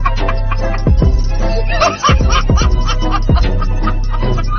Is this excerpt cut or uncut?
uncut